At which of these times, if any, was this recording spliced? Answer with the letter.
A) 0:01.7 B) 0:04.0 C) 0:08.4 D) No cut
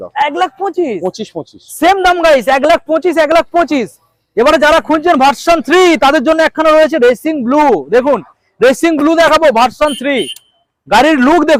D